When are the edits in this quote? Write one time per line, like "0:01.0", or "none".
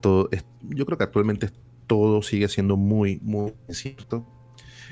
none